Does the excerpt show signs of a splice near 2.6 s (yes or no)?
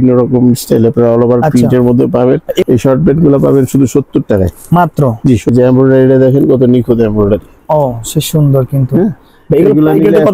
yes